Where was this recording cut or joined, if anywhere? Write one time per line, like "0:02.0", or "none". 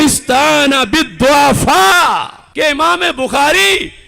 0:02.4